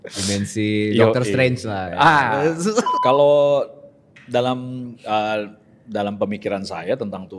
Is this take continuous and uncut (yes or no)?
no